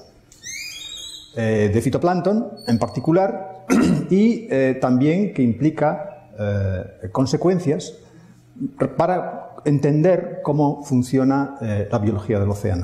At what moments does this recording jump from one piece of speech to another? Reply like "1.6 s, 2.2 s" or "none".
5.5 s